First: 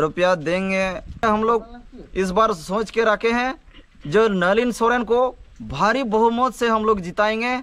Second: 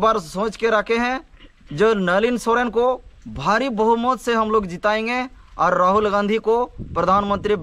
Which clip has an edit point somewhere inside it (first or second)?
first